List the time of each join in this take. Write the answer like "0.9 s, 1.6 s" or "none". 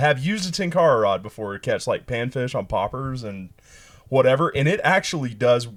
none